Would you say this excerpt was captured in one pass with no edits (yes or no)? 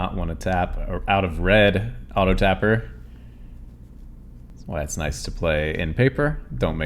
no